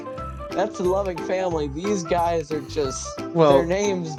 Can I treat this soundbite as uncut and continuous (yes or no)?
yes